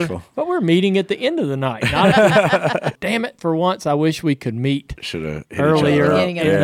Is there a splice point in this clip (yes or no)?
yes